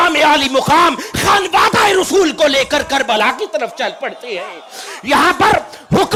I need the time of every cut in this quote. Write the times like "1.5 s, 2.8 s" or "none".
none